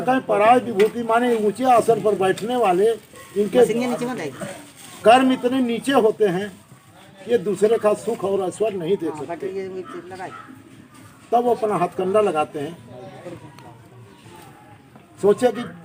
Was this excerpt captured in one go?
yes; 0 cuts

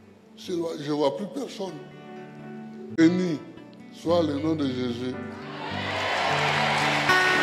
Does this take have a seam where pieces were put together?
yes; 1 cut; at 3.0 s

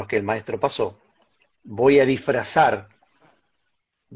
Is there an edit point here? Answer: no; 0 cuts

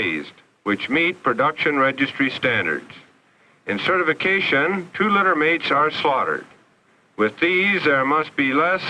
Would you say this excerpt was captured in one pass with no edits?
no; 1 cut; at 2.9 s

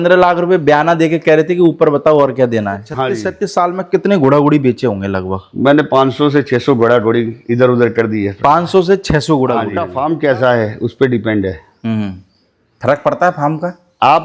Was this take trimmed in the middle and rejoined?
yes; 2 cuts; at 3.2 s, 9.8 s

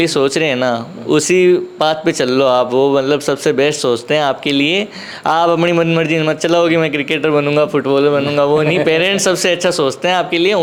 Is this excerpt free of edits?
yes; 0 cuts

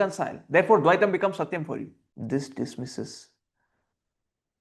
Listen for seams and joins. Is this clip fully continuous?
no; 1 cut; at 2.0 s

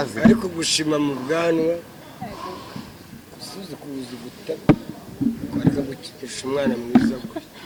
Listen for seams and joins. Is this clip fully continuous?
yes; 0 cuts

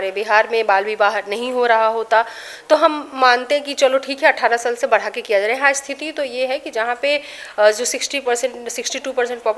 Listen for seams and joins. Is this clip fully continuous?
yes; 0 cuts

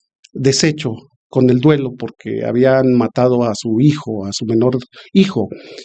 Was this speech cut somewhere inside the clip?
no; 0 cuts

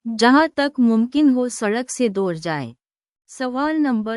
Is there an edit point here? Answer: no; 0 cuts

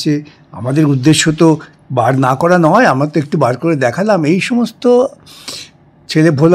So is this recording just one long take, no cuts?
yes; 0 cuts

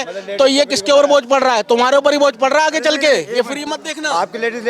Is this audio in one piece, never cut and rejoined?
yes; 0 cuts

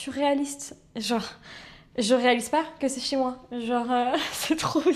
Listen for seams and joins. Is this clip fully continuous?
yes; 0 cuts

